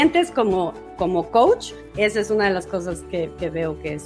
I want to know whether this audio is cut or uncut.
cut